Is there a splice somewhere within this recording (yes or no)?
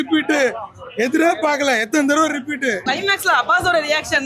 yes